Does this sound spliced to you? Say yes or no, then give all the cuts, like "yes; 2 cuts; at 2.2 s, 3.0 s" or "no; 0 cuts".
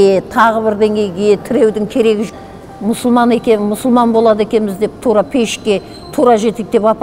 yes; 1 cut; at 2.3 s